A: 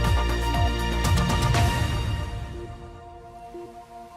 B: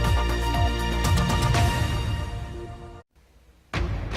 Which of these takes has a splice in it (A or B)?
A